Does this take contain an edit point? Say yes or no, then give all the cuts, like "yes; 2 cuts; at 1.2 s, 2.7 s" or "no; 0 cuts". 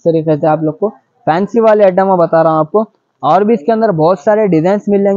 no; 0 cuts